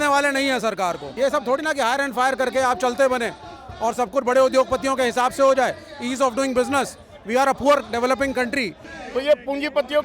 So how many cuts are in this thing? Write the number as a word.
two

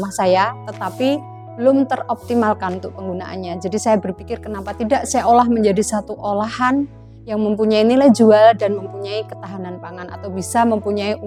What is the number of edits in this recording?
zero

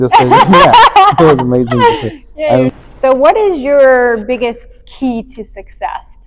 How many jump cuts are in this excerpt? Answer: one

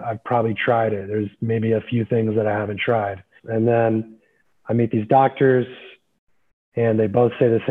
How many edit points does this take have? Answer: one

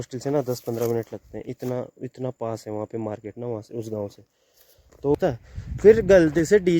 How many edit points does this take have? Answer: one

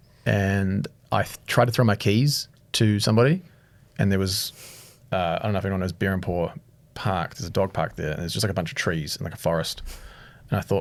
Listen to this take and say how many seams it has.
zero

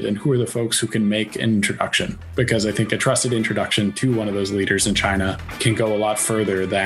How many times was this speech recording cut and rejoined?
one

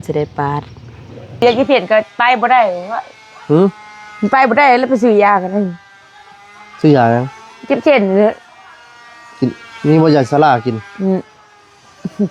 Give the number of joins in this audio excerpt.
one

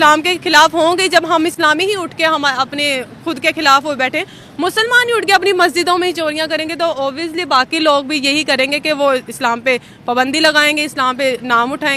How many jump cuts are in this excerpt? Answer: zero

